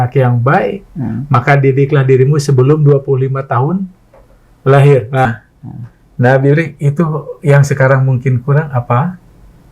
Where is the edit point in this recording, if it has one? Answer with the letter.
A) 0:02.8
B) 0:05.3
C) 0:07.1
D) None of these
B